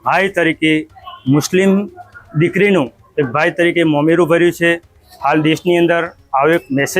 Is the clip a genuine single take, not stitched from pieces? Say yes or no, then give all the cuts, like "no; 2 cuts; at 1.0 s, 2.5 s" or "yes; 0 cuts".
yes; 0 cuts